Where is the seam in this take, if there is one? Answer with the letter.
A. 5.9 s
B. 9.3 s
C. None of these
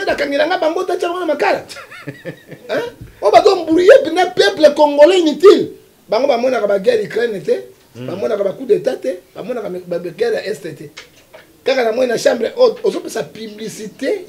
C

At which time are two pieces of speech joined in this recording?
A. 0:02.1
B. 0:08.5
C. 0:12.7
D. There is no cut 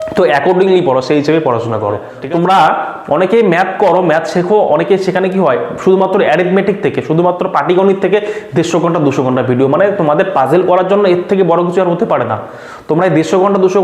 A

